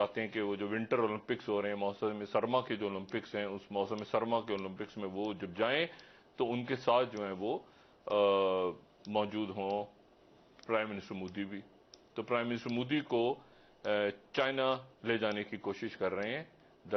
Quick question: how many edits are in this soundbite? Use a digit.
0